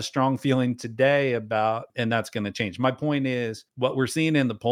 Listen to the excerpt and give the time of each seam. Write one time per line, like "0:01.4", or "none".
0:01.9
0:03.6